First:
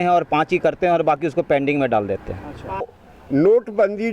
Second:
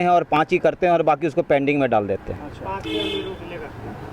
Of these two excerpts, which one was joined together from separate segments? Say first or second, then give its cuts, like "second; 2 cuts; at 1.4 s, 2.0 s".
first; 1 cut; at 2.9 s